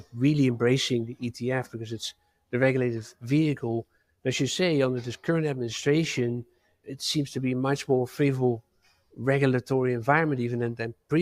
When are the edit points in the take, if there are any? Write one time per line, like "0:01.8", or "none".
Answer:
0:06.8

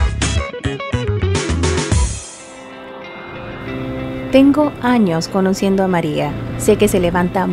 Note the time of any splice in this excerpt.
0:02.3

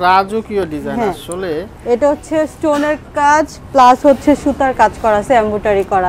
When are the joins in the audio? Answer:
none

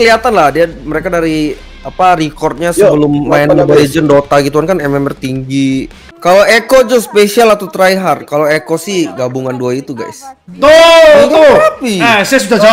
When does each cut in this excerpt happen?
0:06.1
0:10.5

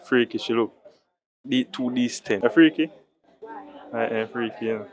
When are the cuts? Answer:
0:02.4

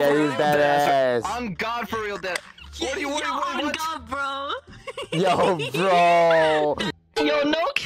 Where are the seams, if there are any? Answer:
0:06.9

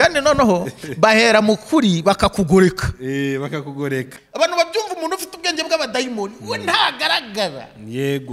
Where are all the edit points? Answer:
0:04.1

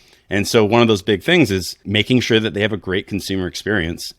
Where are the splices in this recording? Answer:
0:01.8

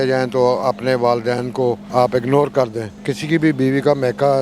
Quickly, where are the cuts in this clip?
0:01.8
0:03.0

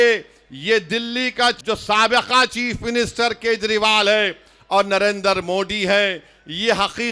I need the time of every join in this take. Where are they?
0:01.6

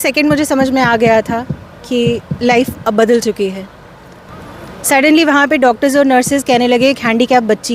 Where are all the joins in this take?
0:04.2

